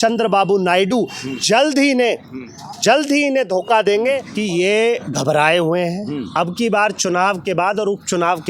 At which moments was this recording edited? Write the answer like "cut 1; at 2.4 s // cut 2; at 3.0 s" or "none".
cut 1; at 4.3 s